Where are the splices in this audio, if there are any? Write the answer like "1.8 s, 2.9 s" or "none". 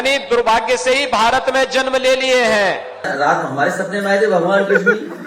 3.1 s